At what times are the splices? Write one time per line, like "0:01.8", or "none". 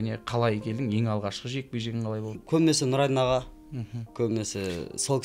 0:02.4